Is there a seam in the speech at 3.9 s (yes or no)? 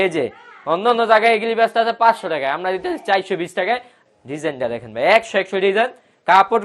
yes